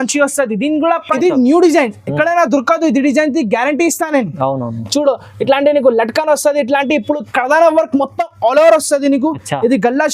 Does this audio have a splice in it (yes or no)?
yes